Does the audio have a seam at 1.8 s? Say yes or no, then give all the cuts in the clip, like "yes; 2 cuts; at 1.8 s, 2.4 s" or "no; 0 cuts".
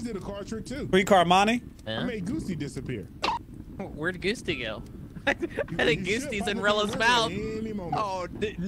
no; 1 cut; at 3.3 s